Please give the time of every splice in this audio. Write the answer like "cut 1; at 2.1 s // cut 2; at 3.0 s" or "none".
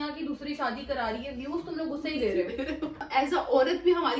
cut 1; at 3.0 s